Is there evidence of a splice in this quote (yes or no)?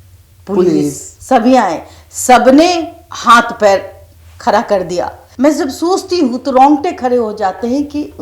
yes